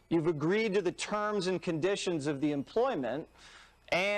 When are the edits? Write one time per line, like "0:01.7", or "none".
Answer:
0:02.8